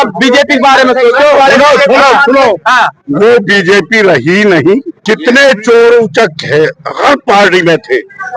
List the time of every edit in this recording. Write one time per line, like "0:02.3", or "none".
0:04.9